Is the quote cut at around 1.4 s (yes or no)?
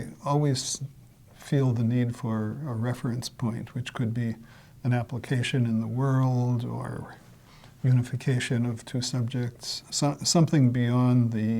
no